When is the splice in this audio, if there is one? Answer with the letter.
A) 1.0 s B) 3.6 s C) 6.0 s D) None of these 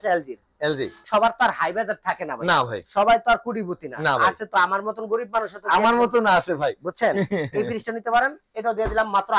A